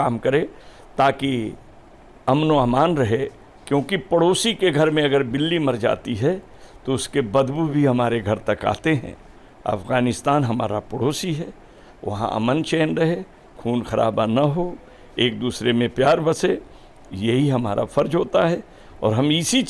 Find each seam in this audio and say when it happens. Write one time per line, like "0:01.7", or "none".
none